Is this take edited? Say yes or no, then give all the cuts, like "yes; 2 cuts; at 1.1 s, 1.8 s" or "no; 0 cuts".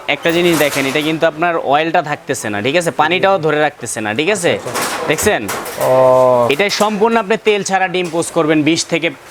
no; 0 cuts